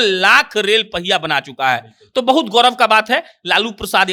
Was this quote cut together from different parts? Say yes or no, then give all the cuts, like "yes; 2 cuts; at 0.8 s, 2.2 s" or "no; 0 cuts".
no; 0 cuts